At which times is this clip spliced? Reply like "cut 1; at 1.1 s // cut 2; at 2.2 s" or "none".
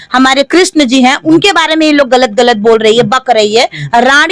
none